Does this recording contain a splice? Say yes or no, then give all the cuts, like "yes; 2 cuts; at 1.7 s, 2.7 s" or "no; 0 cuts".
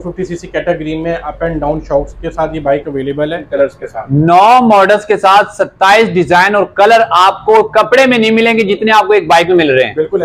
yes; 1 cut; at 3.4 s